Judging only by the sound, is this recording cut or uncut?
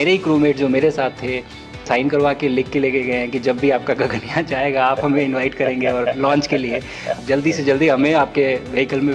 cut